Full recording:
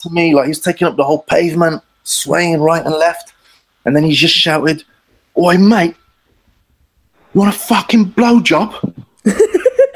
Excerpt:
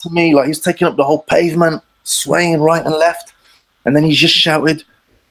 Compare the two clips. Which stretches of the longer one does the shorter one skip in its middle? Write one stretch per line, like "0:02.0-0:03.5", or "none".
none